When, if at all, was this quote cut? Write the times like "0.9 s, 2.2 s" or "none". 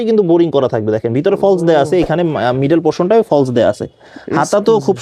none